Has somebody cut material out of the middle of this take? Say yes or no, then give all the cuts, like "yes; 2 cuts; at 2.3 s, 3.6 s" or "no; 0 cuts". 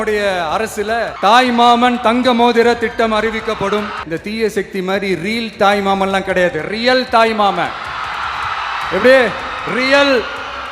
yes; 2 cuts; at 1.1 s, 4.0 s